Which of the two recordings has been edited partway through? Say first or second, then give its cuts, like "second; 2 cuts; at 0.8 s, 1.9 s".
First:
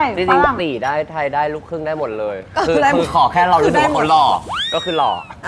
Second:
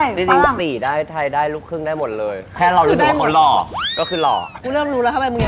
second; 2 cuts; at 2.6 s, 4.6 s